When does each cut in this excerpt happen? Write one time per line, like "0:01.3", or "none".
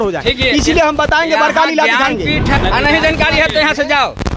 0:02.6